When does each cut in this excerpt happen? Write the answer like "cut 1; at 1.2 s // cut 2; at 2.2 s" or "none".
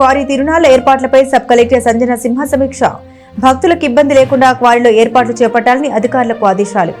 none